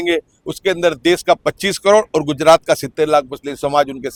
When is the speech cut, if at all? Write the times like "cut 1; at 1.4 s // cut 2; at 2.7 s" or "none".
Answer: none